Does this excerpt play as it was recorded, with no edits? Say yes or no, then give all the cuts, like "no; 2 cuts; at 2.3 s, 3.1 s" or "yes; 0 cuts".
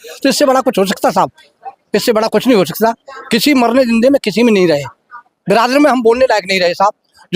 yes; 0 cuts